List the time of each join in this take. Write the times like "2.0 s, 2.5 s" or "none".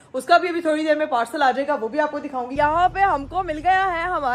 2.5 s